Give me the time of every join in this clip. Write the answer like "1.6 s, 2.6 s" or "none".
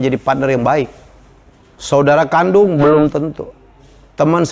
none